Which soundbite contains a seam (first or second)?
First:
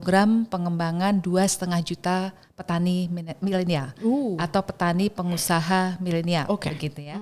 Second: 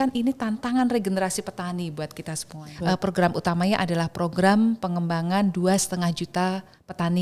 second